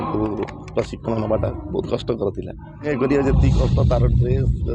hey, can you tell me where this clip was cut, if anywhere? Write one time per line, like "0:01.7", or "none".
0:02.9